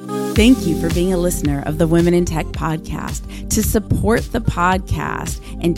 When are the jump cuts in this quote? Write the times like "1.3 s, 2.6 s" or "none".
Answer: none